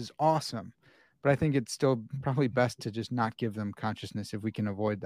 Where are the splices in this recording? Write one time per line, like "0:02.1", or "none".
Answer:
none